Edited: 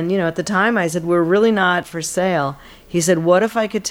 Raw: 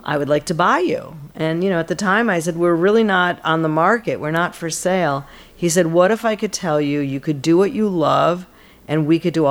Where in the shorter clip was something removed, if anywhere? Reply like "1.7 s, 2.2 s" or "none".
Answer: 1.9 s

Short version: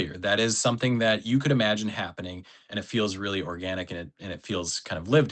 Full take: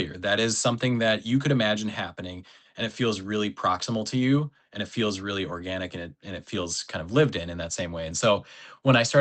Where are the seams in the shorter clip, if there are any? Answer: 2.6 s

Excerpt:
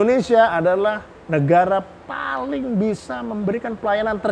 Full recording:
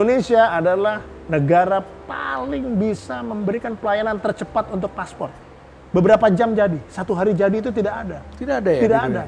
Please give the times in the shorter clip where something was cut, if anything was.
none

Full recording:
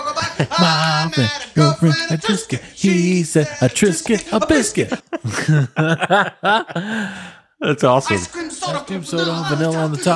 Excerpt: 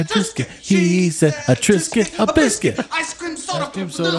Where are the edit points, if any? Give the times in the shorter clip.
3.1 s

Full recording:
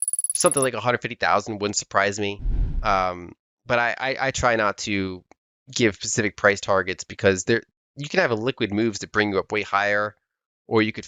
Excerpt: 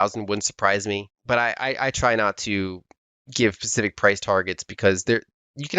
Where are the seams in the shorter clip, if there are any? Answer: 1.1 s

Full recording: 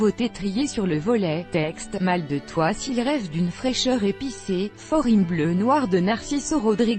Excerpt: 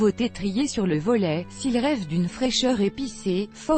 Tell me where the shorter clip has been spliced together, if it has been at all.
1.5 s

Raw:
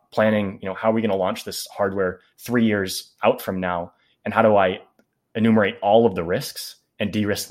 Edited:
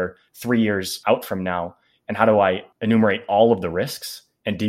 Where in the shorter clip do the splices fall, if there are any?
0.9 s, 2.7 s

